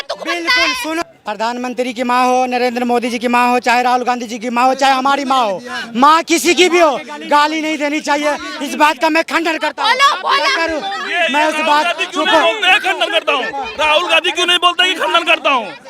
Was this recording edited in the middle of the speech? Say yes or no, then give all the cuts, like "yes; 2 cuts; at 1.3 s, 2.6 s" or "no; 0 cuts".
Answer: yes; 1 cut; at 1.0 s